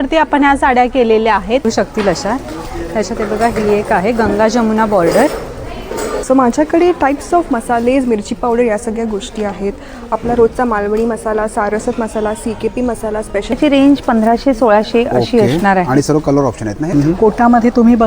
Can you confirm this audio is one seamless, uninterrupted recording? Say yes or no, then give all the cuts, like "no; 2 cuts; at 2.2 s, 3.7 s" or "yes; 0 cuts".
no; 4 cuts; at 1.6 s, 6.2 s, 13.5 s, 16.9 s